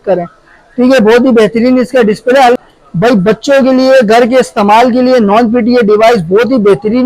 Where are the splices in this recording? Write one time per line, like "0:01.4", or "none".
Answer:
0:02.6